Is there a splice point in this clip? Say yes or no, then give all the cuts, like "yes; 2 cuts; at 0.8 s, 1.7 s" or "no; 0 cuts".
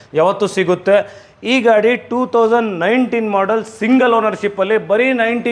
no; 0 cuts